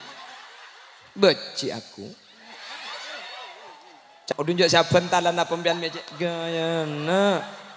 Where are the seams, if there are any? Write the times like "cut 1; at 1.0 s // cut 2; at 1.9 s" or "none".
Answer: cut 1; at 4.3 s